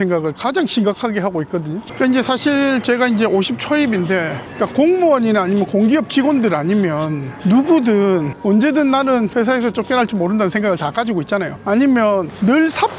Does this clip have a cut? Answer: no; 0 cuts

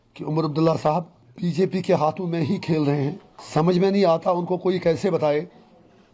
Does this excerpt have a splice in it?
yes; 2 cuts; at 1.2 s, 3.3 s

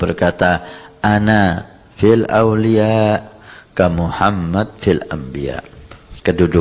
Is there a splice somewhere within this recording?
no; 0 cuts

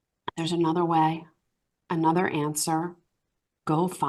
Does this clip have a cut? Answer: no; 0 cuts

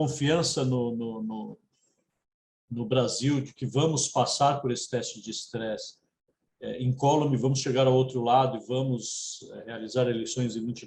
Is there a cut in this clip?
no; 0 cuts

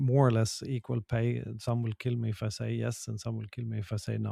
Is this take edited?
no; 0 cuts

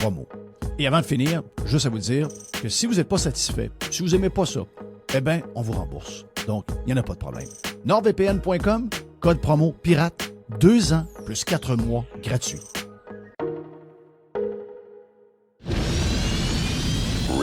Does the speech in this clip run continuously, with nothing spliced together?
no; 1 cut; at 15.5 s

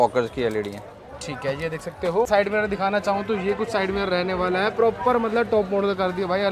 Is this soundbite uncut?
yes; 0 cuts

